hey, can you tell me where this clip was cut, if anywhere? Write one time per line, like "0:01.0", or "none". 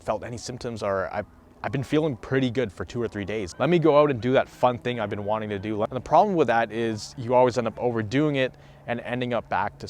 0:03.5
0:05.9